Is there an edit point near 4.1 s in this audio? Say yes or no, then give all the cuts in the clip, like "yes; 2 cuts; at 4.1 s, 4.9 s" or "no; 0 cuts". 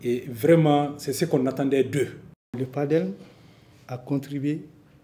no; 1 cut; at 2.2 s